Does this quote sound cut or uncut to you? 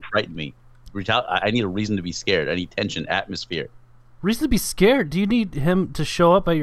uncut